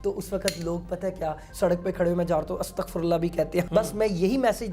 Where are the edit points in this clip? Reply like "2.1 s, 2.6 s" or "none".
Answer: 1.4 s, 3.7 s